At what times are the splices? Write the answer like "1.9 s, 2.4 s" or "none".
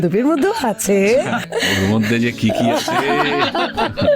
1.5 s